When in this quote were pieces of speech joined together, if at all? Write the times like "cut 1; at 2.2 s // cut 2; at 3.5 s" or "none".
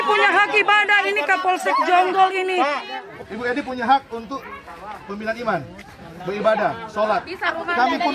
cut 1; at 3.1 s